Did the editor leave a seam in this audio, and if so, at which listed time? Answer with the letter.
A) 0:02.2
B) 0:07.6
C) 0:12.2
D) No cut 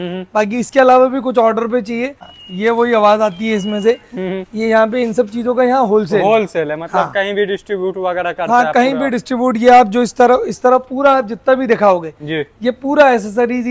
A